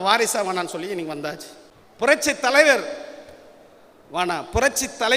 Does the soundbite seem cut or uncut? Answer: cut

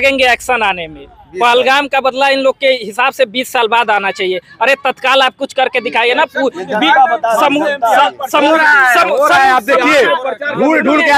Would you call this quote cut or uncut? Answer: uncut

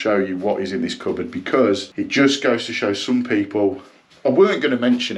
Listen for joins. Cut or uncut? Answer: uncut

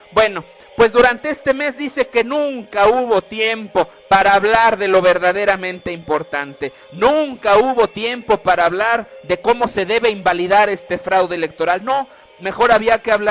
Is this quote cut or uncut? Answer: cut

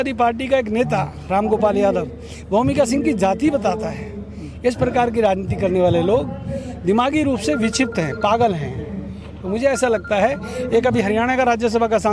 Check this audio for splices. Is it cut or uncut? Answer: uncut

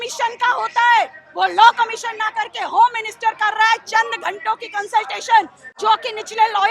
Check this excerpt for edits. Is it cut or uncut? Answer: uncut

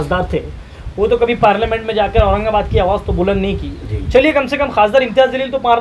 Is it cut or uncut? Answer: uncut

